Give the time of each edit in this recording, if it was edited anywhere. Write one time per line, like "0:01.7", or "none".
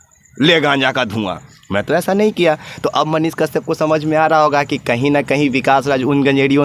none

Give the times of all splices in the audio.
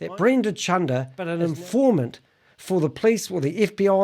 0:01.2

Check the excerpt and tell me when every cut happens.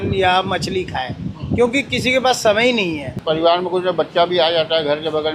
0:03.1

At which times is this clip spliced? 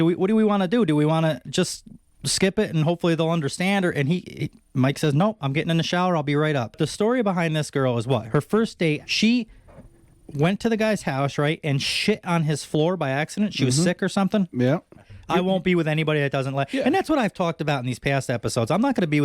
0:06.8
0:08.2
0:09.1
0:15.1

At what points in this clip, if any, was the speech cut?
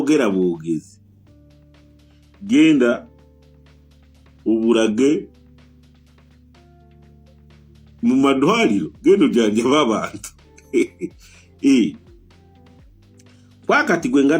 0:12.2
0:13.5

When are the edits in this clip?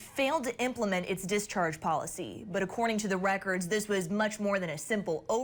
none

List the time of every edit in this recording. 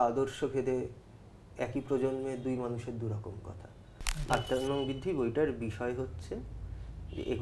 0:04.2

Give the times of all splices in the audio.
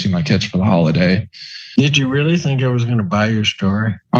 0:01.3

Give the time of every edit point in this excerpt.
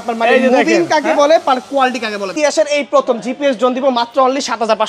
0:02.4

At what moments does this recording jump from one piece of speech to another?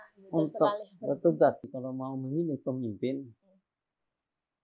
0:01.7

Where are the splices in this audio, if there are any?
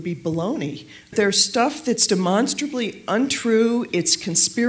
0:01.1

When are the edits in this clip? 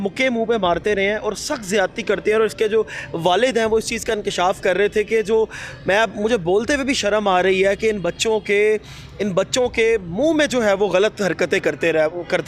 none

